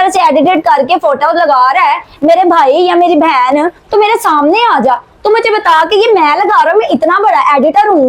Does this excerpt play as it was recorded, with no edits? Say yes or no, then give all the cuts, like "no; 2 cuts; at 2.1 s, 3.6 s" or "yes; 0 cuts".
yes; 0 cuts